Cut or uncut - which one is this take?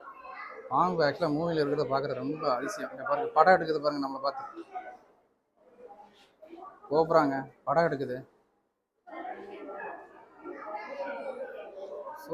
uncut